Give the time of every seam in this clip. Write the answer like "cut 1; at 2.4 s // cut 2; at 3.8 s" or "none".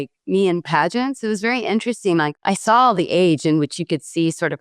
cut 1; at 2.3 s